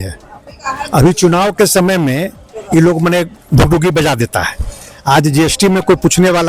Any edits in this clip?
no; 0 cuts

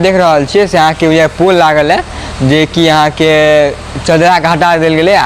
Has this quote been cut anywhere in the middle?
no; 0 cuts

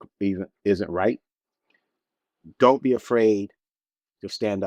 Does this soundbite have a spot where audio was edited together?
no; 0 cuts

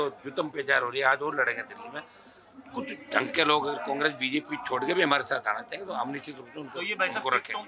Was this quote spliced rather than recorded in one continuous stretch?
no; 0 cuts

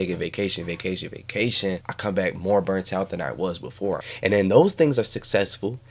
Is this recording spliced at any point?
yes; 2 cuts; at 1.9 s, 4.1 s

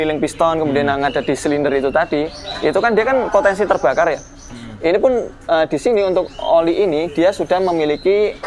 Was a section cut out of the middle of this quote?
no; 0 cuts

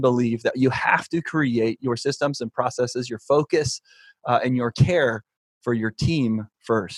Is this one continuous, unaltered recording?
yes; 0 cuts

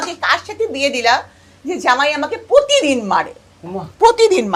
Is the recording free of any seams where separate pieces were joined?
yes; 0 cuts

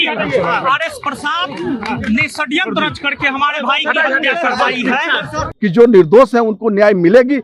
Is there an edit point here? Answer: yes; 1 cut; at 5.5 s

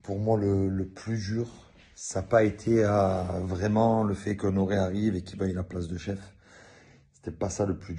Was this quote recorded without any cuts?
no; 1 cut; at 5.8 s

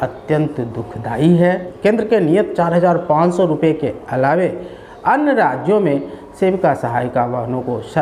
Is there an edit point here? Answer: yes; 1 cut; at 1.7 s

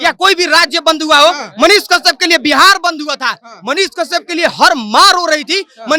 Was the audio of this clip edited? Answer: no; 0 cuts

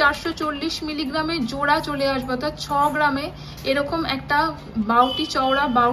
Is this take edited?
no; 0 cuts

